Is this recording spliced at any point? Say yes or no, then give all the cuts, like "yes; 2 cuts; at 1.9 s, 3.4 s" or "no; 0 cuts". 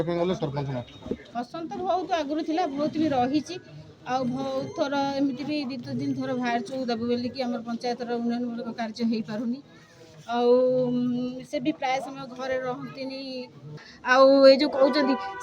yes; 2 cuts; at 1.3 s, 13.9 s